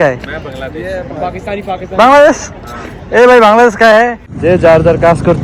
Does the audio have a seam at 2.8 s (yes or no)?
no